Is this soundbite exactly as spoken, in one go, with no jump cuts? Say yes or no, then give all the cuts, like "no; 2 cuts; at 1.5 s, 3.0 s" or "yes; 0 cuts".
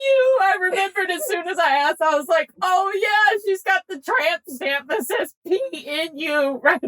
yes; 0 cuts